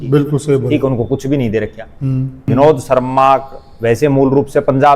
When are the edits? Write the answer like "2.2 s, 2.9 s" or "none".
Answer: 2.4 s